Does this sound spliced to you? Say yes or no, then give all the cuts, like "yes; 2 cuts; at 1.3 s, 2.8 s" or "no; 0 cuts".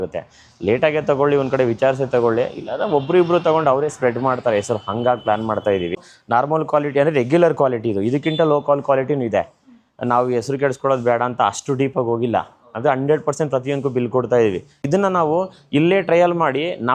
yes; 2 cuts; at 6.1 s, 14.9 s